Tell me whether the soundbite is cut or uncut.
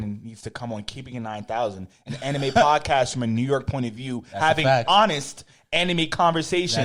uncut